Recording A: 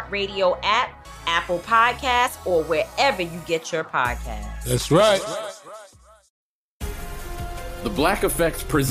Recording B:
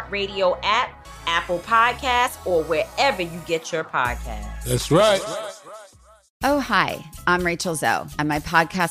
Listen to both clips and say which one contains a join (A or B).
B